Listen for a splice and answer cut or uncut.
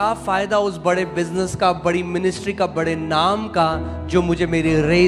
uncut